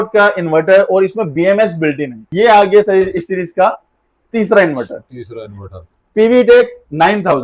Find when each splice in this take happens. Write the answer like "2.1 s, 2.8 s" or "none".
2.2 s